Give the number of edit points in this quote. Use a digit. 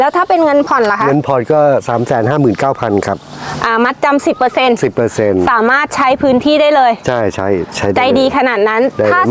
0